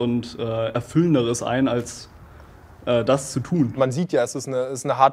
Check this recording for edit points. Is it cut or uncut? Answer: uncut